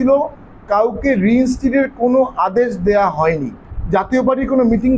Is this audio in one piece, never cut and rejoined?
no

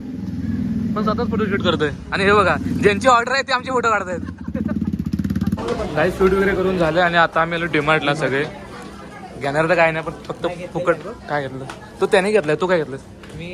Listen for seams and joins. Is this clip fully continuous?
no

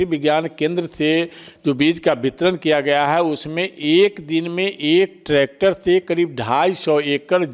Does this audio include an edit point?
no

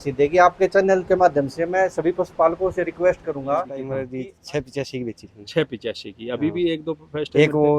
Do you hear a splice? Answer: yes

